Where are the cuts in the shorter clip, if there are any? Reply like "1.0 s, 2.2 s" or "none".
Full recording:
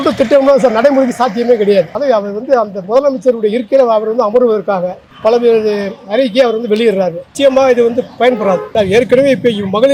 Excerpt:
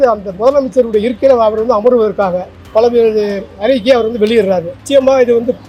none